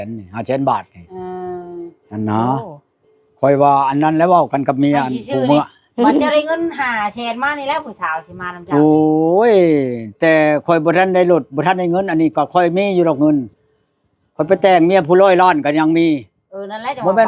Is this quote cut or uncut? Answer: cut